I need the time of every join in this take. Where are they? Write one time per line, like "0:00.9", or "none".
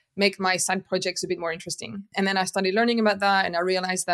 0:02.1